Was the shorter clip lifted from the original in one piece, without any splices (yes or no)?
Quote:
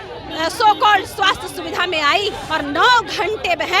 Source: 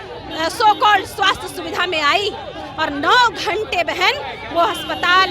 no